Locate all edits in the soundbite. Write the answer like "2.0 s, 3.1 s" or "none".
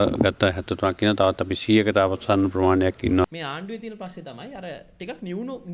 3.2 s